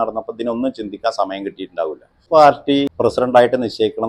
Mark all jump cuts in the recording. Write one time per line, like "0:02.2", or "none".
0:02.2
0:02.9